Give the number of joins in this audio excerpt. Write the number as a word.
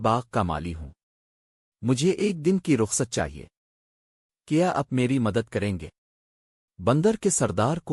zero